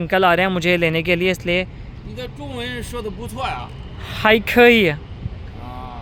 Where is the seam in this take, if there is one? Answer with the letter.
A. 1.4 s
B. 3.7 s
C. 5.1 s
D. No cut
D